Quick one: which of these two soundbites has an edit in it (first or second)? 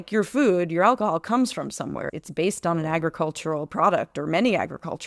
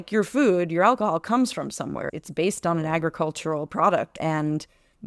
second